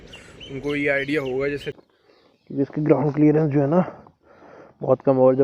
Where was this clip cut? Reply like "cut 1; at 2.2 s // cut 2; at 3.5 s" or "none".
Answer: cut 1; at 1.7 s